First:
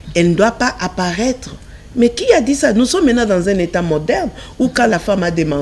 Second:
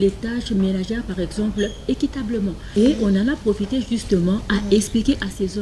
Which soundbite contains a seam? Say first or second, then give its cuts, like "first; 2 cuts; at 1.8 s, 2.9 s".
second; 1 cut; at 2.6 s